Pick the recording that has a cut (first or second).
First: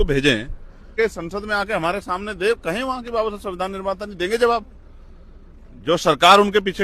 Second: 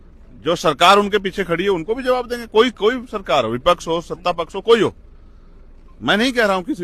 first